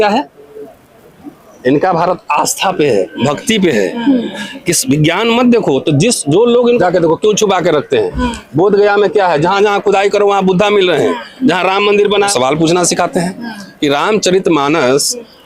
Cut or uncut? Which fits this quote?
cut